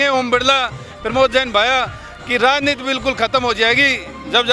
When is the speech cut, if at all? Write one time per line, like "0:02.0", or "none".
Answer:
none